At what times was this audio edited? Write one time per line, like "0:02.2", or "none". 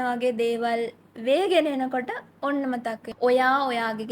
0:03.1